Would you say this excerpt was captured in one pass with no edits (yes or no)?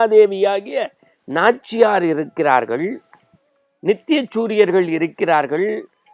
yes